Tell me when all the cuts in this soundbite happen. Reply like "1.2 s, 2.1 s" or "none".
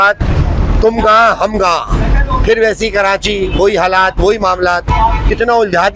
none